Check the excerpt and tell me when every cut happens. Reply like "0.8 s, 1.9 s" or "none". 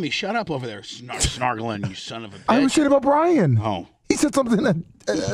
none